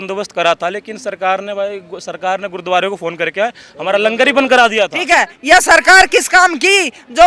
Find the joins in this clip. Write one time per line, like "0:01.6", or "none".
0:05.0